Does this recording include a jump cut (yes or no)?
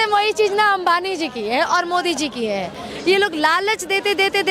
no